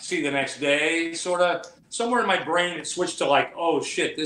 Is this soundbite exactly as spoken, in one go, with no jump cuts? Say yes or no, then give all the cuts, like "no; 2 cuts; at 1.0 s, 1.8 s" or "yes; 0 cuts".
yes; 0 cuts